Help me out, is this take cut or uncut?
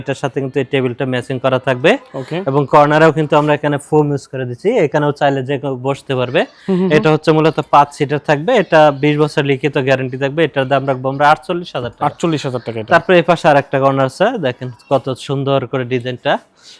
uncut